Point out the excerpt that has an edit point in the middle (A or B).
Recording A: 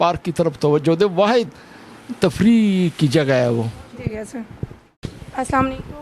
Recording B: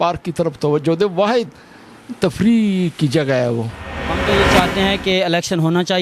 B